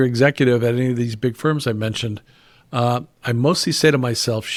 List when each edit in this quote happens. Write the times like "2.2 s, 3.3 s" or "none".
none